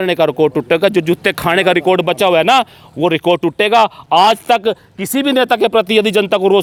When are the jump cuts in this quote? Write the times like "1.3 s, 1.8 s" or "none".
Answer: none